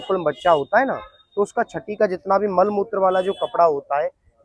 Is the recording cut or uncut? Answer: uncut